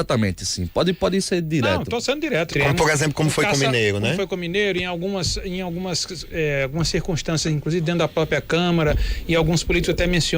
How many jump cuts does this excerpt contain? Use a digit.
1